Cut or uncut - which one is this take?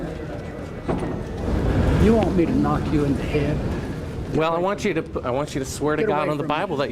cut